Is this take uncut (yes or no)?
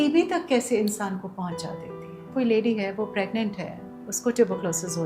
no